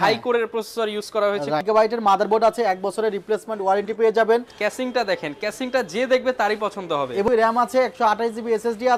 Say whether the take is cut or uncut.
cut